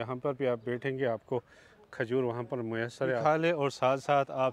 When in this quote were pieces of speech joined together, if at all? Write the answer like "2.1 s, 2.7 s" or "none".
3.2 s